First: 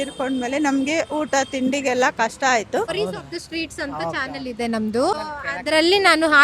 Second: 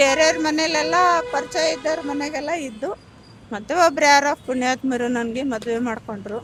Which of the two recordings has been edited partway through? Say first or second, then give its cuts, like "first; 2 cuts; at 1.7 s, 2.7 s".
first; 2 cuts; at 2.9 s, 5.1 s